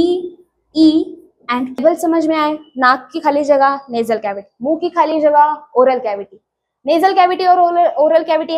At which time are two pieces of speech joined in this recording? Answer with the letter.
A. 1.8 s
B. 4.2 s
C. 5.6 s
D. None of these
A